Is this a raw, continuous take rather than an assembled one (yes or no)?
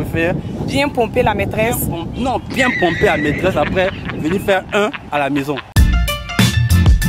no